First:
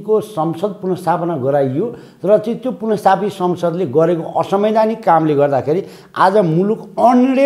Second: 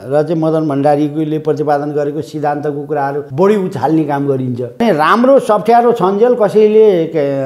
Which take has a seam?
second; 2 cuts; at 3.3 s, 4.8 s

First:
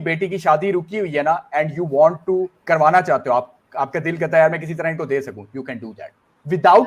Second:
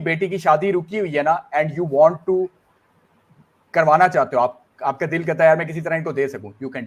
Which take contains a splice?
first; 1 cut; at 2.6 s

